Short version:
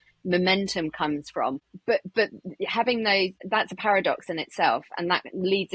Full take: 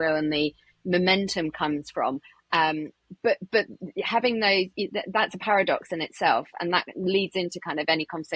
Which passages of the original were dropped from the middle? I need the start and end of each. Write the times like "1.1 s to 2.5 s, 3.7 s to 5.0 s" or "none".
2.3 s to 3.1 s, 4.7 s to 5.0 s